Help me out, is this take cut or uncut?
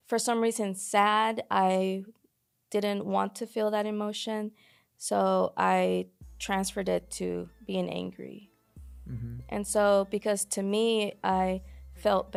uncut